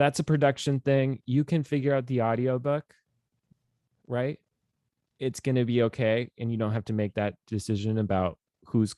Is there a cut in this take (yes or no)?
yes